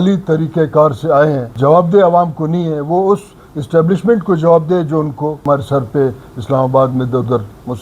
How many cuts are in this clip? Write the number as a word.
two